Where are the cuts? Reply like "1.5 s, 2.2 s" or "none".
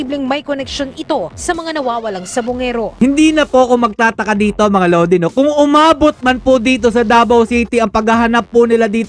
none